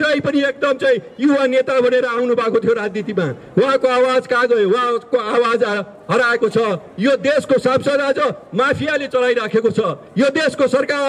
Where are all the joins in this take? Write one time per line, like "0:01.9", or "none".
none